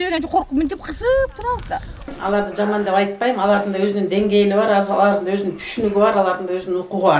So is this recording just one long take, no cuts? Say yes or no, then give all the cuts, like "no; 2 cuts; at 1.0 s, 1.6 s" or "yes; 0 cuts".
no; 1 cut; at 2.1 s